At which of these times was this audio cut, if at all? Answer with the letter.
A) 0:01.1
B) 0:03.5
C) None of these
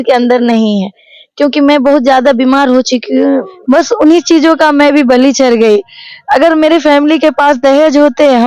B